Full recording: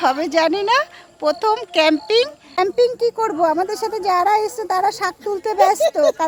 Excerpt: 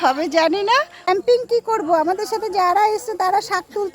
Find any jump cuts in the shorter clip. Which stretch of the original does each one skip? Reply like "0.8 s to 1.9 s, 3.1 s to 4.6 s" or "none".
0.9 s to 2.4 s